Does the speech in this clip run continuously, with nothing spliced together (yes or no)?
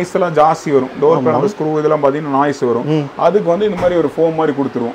yes